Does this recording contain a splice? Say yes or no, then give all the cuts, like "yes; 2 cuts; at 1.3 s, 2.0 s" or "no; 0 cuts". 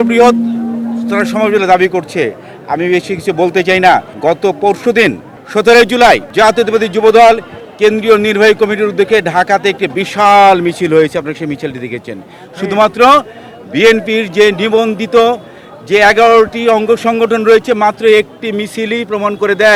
no; 0 cuts